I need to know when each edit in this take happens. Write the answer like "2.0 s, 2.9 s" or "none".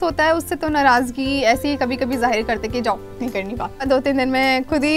3.9 s